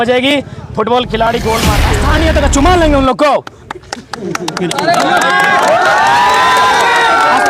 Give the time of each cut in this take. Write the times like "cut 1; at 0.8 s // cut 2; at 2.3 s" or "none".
cut 1; at 1.8 s